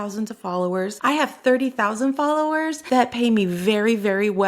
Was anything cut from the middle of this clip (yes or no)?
yes